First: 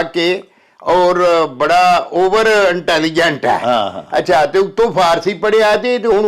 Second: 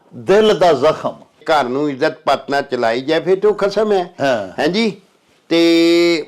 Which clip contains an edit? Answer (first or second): second